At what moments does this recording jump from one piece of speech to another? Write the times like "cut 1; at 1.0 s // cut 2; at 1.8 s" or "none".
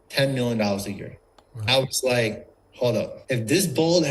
cut 1; at 1.7 s // cut 2; at 3.2 s